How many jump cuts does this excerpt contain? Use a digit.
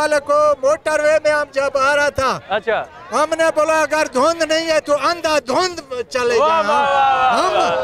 0